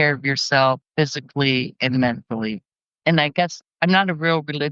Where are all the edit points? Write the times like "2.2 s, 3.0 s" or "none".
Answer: none